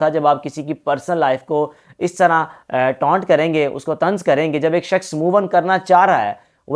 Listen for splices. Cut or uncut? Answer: uncut